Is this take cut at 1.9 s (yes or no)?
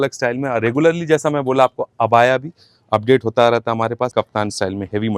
no